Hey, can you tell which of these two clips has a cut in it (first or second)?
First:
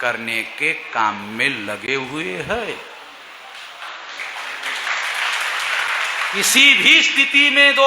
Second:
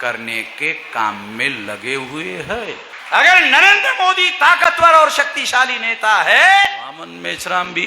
second